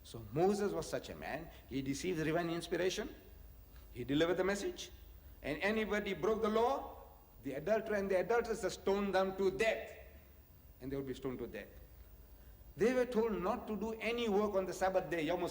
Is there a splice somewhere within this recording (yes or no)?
yes